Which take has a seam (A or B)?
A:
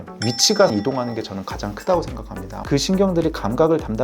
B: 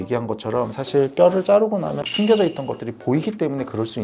A